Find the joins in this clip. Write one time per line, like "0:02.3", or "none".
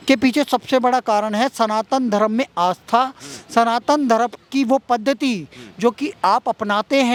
none